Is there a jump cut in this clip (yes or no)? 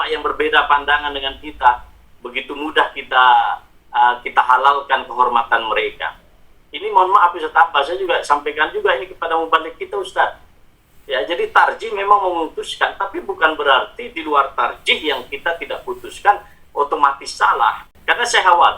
yes